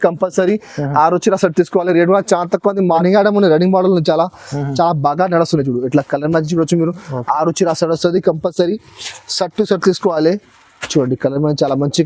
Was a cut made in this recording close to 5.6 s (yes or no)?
no